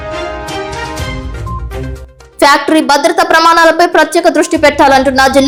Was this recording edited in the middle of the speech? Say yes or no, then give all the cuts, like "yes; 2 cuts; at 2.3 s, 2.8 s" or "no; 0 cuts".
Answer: no; 0 cuts